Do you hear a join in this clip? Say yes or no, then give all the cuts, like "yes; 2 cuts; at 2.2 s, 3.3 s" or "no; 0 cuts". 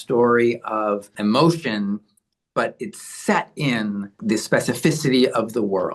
yes; 2 cuts; at 1.1 s, 4.2 s